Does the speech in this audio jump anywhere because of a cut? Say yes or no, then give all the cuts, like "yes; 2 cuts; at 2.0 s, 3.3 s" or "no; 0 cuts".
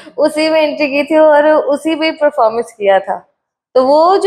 no; 0 cuts